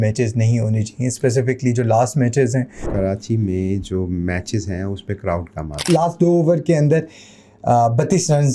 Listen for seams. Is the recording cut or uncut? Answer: cut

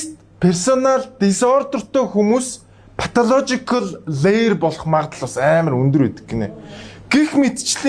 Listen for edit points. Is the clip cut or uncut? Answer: uncut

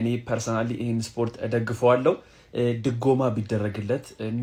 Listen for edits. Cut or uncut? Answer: uncut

